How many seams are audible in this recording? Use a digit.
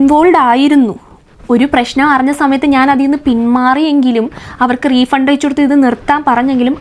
0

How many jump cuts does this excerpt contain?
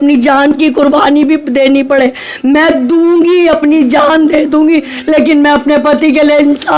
0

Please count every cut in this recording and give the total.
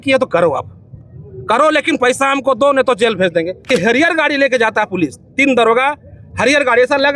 1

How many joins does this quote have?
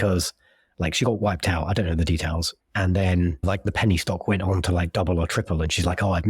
1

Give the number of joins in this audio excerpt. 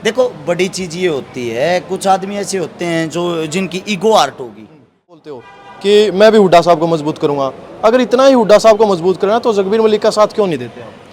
1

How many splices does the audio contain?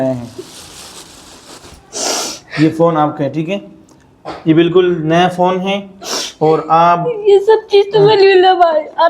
1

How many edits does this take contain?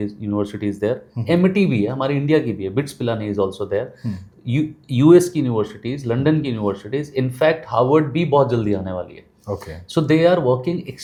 0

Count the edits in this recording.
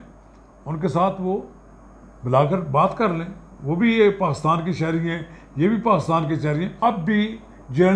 1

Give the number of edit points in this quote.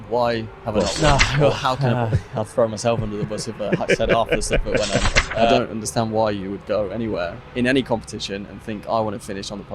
2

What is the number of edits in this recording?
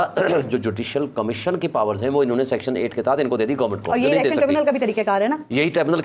0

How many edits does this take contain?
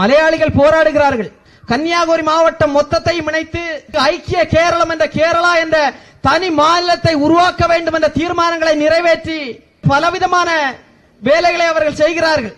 2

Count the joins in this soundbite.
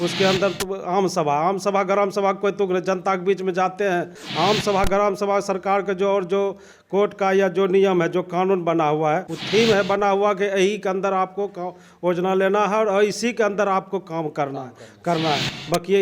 2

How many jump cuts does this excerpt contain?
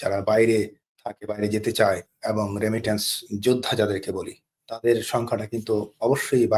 1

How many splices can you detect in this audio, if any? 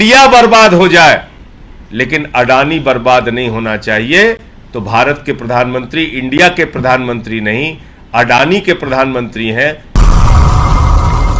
1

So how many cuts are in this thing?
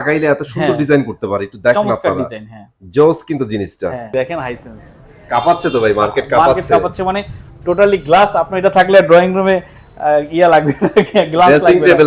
1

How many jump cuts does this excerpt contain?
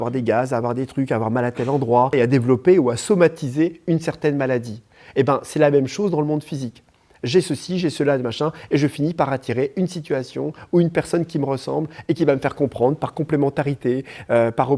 1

